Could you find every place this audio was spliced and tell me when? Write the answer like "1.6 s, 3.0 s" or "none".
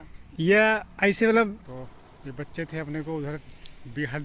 1.6 s